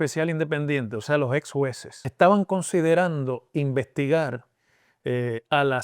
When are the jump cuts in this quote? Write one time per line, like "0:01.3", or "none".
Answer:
0:02.1